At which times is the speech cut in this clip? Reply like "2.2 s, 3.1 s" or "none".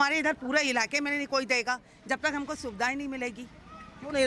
none